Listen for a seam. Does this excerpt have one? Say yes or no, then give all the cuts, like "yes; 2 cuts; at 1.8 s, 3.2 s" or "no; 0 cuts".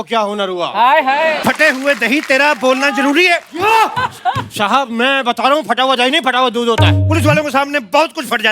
yes; 1 cut; at 1.4 s